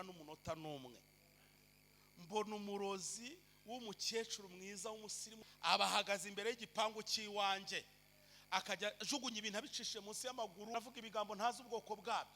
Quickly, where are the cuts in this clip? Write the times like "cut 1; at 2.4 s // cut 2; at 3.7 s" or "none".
cut 1; at 5.3 s // cut 2; at 10.7 s